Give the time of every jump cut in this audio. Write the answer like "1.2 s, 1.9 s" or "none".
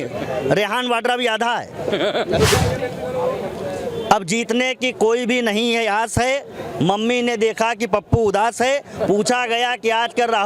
2.5 s